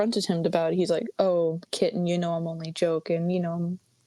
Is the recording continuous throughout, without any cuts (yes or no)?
yes